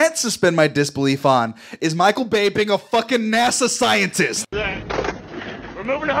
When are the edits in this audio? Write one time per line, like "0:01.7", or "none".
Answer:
0:04.5